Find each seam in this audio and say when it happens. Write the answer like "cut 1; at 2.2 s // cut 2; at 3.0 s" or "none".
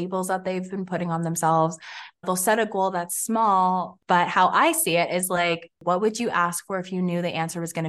cut 1; at 2.0 s // cut 2; at 3.9 s // cut 3; at 5.8 s